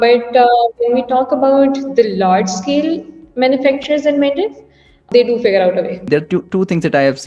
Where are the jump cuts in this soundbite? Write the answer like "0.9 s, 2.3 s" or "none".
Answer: 5.1 s, 6.1 s